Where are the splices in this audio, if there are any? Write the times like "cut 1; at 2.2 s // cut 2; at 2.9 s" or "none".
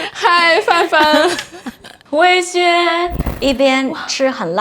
cut 1; at 3.2 s